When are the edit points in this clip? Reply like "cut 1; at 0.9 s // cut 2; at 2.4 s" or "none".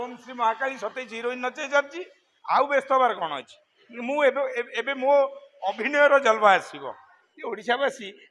cut 1; at 7.1 s